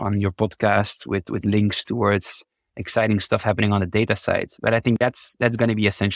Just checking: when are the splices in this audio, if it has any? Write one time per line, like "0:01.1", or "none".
none

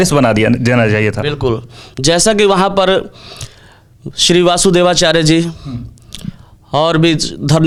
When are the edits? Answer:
none

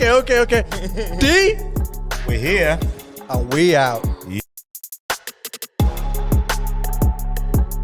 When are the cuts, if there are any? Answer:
0:04.4

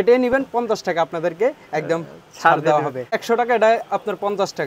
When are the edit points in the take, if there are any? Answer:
0:03.2

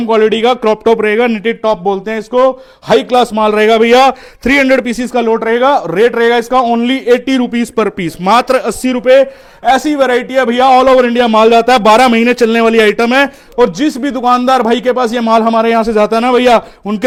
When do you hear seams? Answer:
none

